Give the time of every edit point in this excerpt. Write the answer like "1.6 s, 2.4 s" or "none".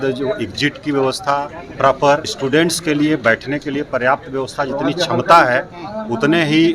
2.3 s